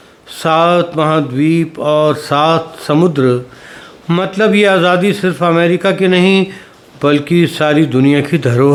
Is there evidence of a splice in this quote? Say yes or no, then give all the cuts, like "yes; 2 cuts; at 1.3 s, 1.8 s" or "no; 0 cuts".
no; 0 cuts